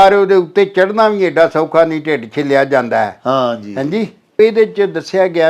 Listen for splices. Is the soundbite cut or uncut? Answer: cut